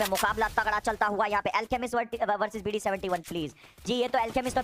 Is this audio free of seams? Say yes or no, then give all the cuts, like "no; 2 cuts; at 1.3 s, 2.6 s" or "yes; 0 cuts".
yes; 0 cuts